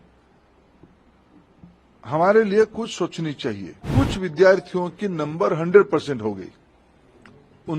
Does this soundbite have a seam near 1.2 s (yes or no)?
no